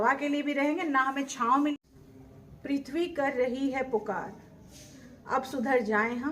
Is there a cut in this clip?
yes; 1 cut; at 1.7 s

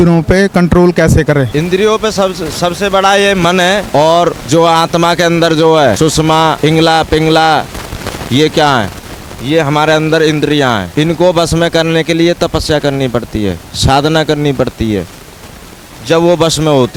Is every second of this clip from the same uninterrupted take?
yes; 0 cuts

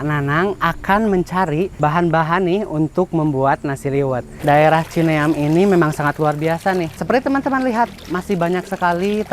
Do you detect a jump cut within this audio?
yes; 3 cuts; at 1.7 s, 4.3 s, 6.9 s

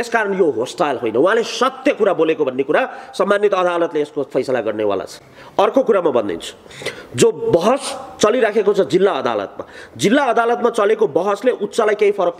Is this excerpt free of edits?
yes; 0 cuts

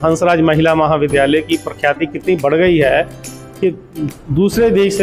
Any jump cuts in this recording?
no; 0 cuts

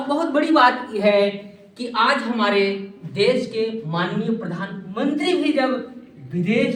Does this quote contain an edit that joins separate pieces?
no; 0 cuts

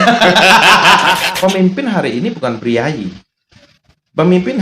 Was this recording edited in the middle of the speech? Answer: yes; 1 cut; at 1.2 s

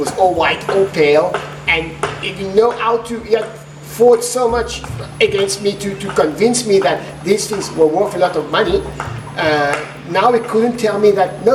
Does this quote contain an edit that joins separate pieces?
no; 0 cuts

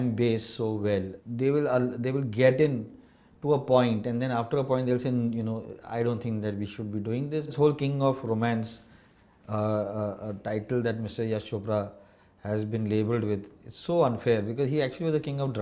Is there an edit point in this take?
yes; 2 cuts; at 1.2 s, 7.5 s

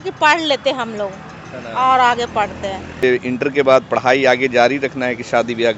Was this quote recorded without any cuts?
no; 1 cut; at 3.0 s

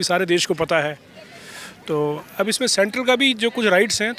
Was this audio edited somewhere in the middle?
no; 0 cuts

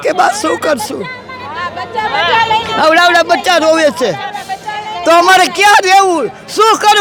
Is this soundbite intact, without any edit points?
yes; 0 cuts

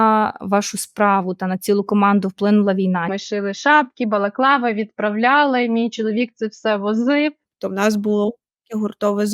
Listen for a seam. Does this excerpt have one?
yes; 2 cuts; at 3.2 s, 7.5 s

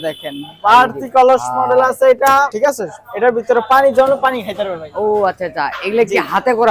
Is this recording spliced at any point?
no; 0 cuts

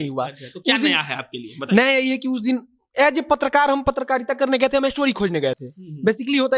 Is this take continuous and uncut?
yes; 0 cuts

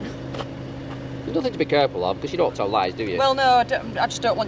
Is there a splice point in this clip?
no; 0 cuts

